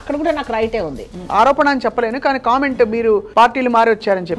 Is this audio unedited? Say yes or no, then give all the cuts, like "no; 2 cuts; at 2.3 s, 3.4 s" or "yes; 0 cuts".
no; 2 cuts; at 1.1 s, 3.3 s